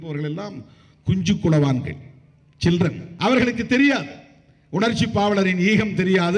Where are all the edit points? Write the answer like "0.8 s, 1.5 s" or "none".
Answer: 3.1 s